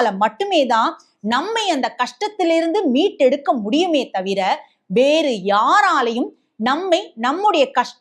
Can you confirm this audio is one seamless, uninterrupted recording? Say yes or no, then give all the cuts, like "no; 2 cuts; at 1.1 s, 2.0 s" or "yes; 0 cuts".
yes; 0 cuts